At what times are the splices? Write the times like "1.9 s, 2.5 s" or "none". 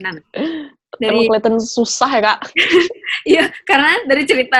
none